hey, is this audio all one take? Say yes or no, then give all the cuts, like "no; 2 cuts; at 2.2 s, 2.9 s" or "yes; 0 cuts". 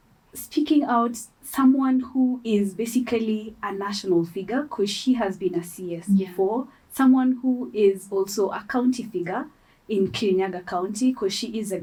yes; 0 cuts